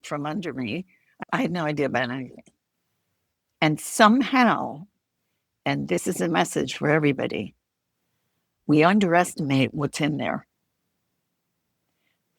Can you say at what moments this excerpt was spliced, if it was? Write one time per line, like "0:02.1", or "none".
0:01.0